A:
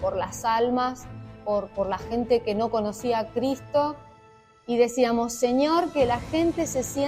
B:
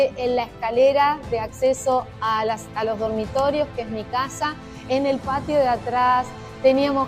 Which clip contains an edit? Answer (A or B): A